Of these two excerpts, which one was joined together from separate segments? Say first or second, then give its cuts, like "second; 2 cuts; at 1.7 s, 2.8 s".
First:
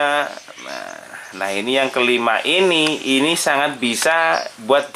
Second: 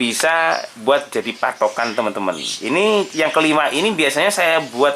second; 1 cut; at 2.5 s